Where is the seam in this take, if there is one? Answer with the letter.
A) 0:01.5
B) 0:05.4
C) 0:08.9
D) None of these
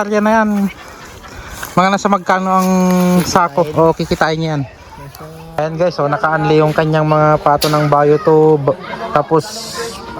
B